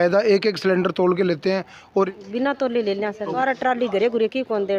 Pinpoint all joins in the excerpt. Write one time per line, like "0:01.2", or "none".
0:02.1
0:03.3